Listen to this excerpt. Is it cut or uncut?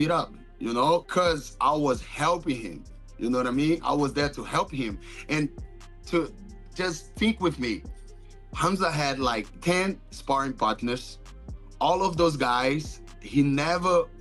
uncut